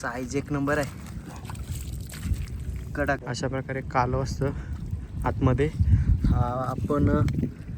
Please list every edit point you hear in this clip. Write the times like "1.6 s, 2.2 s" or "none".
3.2 s